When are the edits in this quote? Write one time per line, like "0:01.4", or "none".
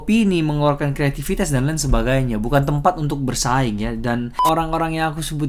0:04.3